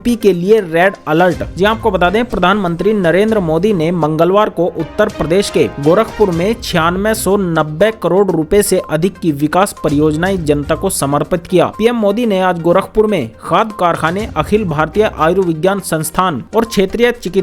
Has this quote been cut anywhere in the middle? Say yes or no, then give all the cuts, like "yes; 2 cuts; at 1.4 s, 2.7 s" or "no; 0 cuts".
no; 0 cuts